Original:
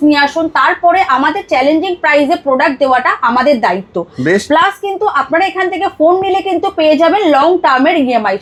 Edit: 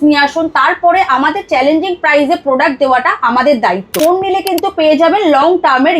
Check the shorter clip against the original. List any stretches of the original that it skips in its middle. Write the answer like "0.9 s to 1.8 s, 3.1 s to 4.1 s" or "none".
3.9 s to 5.9 s